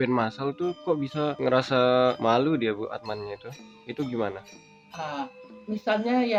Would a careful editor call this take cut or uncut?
uncut